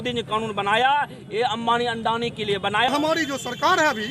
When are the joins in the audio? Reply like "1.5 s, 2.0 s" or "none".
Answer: 2.9 s